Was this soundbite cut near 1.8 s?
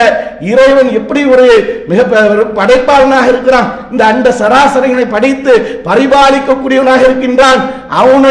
no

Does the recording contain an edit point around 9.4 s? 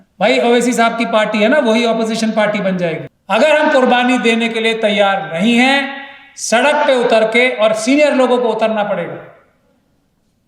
no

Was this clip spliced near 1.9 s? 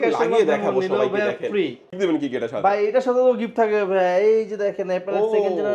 yes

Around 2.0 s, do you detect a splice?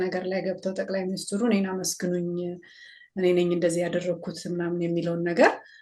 no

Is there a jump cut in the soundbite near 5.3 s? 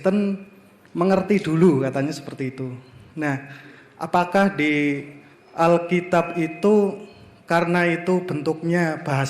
no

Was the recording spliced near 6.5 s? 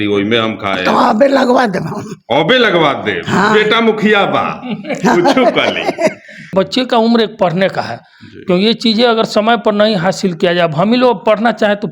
yes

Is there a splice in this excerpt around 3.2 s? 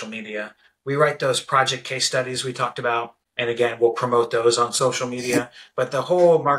yes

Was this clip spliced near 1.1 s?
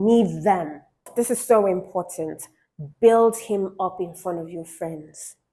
yes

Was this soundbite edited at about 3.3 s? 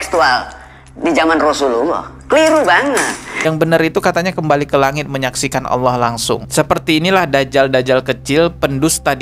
yes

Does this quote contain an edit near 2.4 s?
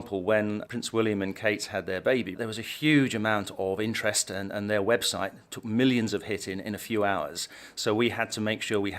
yes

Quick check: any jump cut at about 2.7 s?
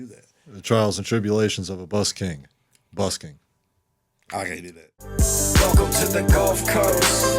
no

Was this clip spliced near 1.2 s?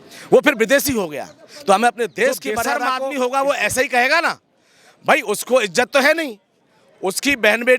no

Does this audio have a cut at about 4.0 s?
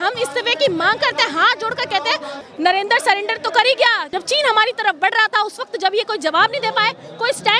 yes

